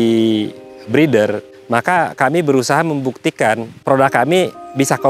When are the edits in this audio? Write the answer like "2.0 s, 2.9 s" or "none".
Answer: 1.5 s, 3.7 s